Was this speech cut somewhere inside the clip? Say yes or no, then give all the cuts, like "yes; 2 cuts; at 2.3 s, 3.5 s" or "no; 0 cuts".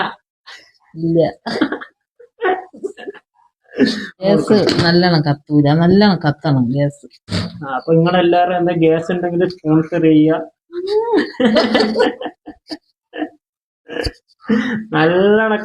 yes; 1 cut; at 4.2 s